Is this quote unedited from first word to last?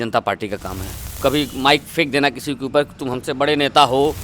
no; 1 cut; at 1.2 s

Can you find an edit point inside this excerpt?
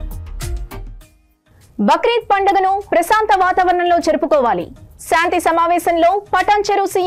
no; 0 cuts

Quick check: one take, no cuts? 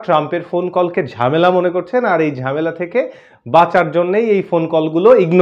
yes; 0 cuts

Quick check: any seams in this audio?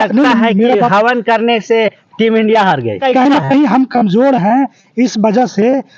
yes; 1 cut; at 3.0 s

